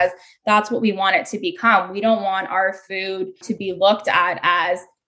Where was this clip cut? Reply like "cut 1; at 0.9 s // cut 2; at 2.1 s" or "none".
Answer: cut 1; at 3.4 s